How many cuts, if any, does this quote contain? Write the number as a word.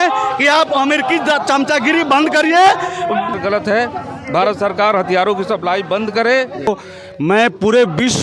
two